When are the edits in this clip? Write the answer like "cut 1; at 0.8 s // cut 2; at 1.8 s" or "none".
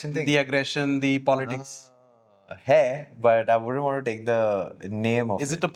none